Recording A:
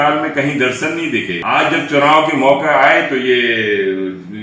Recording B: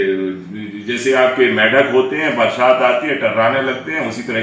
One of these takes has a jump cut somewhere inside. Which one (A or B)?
A